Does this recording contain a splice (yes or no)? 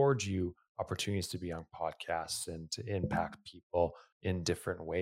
yes